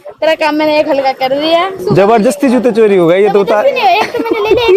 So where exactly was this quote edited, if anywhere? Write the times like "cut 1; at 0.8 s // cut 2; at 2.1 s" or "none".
cut 1; at 1.8 s